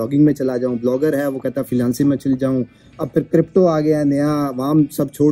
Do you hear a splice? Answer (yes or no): no